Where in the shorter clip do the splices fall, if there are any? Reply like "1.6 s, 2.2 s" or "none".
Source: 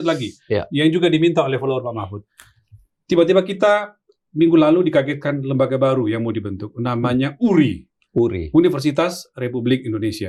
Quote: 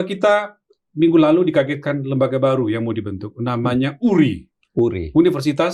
none